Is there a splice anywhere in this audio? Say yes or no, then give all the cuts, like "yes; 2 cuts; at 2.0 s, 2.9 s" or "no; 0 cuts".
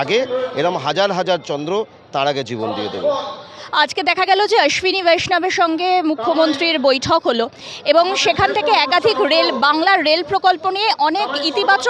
no; 0 cuts